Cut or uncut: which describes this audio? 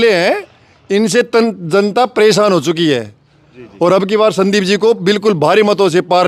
uncut